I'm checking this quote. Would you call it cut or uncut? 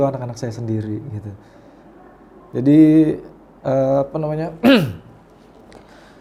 uncut